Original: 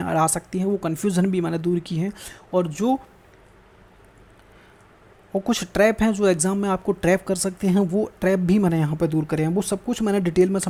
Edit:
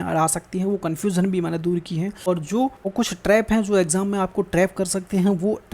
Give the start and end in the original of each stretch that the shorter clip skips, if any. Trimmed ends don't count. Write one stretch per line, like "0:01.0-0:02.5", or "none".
0:02.2-0:02.4
0:03.1-0:05.3